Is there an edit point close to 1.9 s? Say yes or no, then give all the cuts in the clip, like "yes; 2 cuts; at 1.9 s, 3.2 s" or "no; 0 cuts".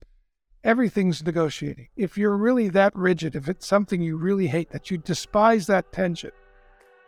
yes; 1 cut; at 1.9 s